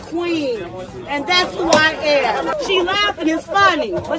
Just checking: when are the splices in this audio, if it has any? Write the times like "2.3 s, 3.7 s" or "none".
2.5 s